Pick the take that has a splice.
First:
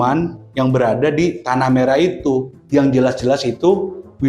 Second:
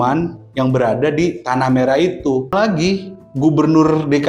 second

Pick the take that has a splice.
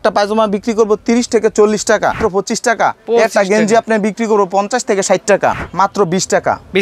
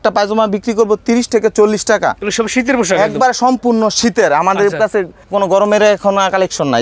first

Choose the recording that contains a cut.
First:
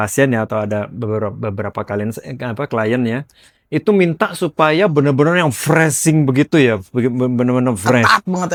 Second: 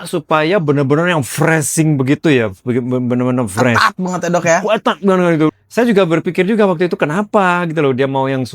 second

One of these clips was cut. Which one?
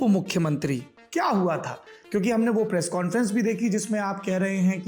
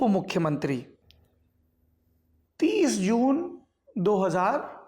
first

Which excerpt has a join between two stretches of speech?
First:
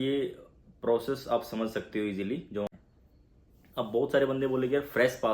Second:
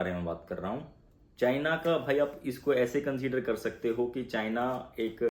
first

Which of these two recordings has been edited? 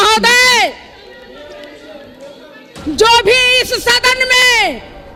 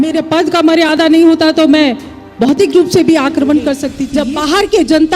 second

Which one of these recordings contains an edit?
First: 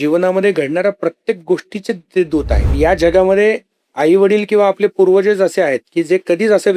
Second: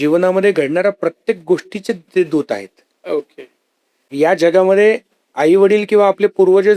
first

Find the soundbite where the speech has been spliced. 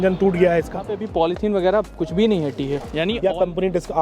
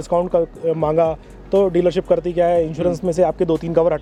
first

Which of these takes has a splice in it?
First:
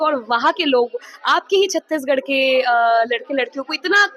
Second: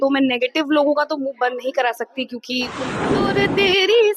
second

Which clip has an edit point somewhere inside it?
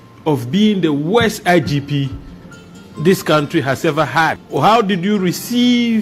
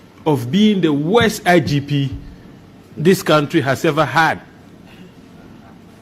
first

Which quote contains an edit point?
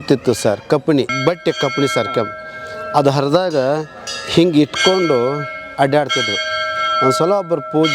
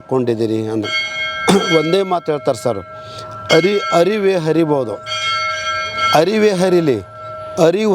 first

